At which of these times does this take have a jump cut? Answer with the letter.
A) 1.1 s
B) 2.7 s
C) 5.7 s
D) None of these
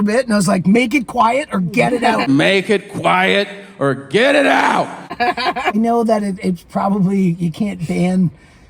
C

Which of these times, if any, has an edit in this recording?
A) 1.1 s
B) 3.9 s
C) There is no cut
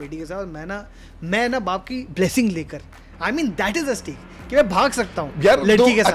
C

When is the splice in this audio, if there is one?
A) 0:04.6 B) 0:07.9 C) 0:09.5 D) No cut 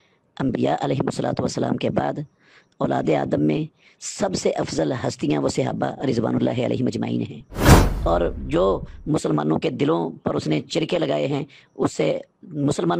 B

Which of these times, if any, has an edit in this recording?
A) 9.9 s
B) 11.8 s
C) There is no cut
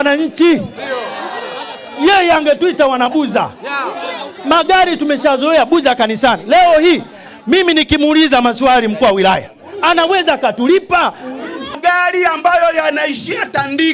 B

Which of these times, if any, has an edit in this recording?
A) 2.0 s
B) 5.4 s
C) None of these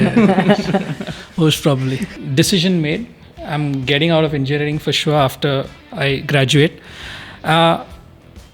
A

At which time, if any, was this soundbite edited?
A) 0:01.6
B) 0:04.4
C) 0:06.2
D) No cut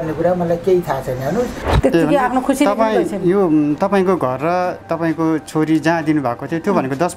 A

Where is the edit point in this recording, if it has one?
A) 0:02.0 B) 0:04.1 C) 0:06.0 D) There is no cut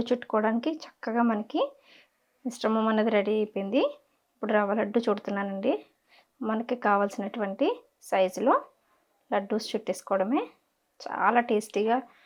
D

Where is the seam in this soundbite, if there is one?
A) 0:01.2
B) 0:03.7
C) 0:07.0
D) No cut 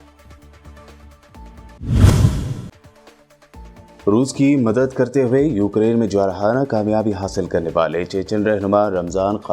A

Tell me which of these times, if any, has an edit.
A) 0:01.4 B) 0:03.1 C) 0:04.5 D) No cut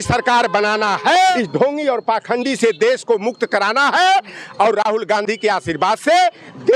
A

